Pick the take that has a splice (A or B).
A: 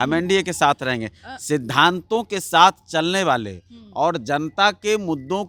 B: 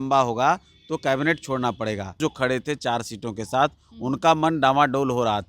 B